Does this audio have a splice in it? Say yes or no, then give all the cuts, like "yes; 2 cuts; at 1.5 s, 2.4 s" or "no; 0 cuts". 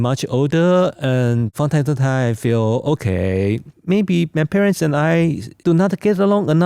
no; 0 cuts